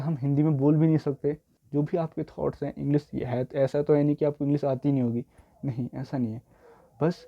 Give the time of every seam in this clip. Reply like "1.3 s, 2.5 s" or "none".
1.5 s